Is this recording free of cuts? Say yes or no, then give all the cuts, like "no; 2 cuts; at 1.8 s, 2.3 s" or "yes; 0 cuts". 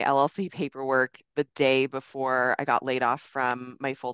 yes; 0 cuts